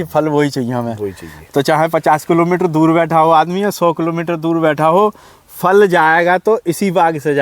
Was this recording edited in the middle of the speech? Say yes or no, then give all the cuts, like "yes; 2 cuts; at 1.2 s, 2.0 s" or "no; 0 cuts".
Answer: no; 0 cuts